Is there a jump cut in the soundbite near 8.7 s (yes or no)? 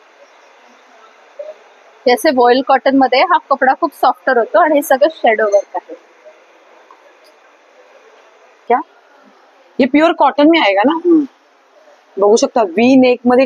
yes